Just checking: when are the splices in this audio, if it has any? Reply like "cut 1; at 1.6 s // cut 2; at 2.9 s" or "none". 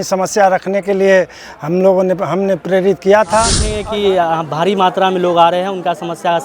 cut 1; at 3.7 s